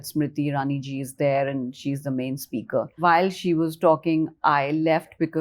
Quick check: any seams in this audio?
yes; 1 cut; at 3.0 s

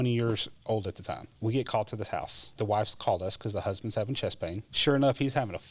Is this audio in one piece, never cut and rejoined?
no; 3 cuts; at 1.3 s, 2.5 s, 4.7 s

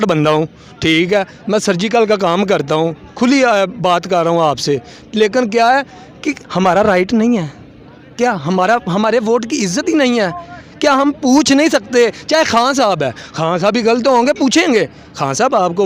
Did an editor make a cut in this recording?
no; 0 cuts

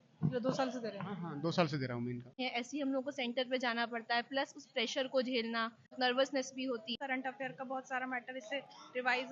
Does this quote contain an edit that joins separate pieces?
yes; 3 cuts; at 2.3 s, 6.0 s, 7.0 s

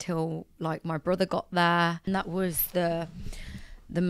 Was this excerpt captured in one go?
no; 1 cut; at 2.1 s

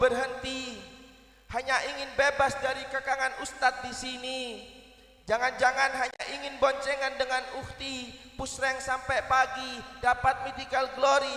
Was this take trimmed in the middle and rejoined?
no; 0 cuts

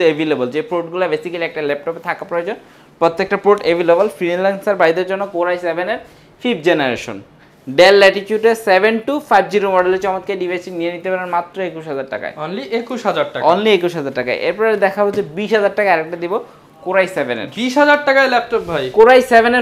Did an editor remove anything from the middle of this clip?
no; 0 cuts

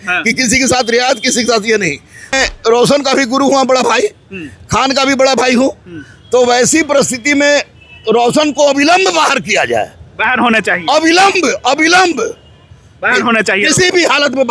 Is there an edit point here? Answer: yes; 1 cut; at 2.3 s

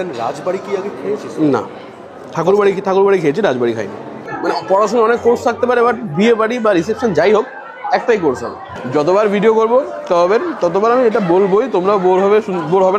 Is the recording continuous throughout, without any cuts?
no; 2 cuts; at 4.2 s, 8.7 s

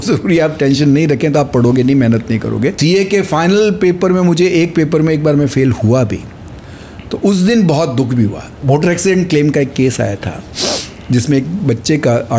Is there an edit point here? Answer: yes; 2 cuts; at 2.8 s, 8.5 s

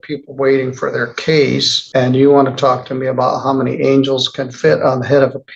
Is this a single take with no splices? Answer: no; 1 cut; at 1.8 s

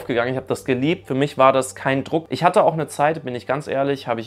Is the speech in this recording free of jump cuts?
no; 1 cut; at 2.3 s

